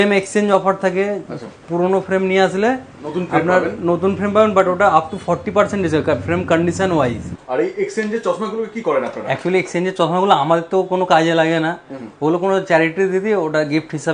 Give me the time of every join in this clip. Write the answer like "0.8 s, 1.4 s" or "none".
none